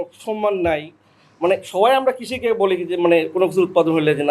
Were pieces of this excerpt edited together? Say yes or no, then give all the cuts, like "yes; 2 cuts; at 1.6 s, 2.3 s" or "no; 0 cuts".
no; 0 cuts